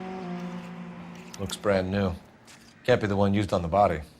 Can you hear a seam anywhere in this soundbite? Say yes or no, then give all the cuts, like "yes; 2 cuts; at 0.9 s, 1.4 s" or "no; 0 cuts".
yes; 1 cut; at 1.2 s